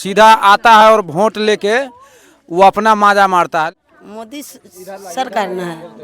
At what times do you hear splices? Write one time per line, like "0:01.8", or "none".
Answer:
0:03.8